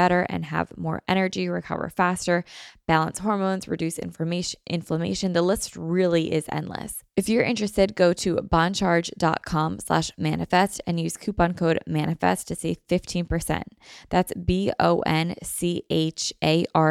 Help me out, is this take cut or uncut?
cut